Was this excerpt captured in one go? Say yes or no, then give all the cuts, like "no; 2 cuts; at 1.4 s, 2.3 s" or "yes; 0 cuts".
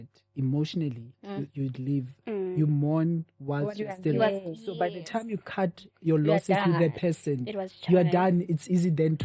yes; 0 cuts